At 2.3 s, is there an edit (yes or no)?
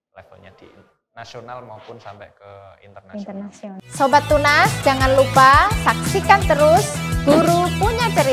no